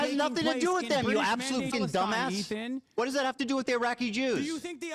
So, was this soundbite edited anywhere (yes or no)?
yes